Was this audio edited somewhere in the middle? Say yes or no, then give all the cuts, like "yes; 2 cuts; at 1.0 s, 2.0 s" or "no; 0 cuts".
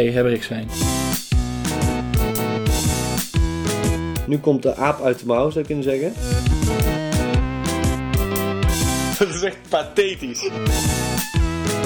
yes; 1 cut; at 10.6 s